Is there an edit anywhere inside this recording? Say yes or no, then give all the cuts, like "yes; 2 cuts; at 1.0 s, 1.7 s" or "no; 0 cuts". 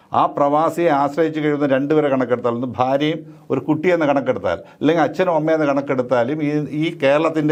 no; 0 cuts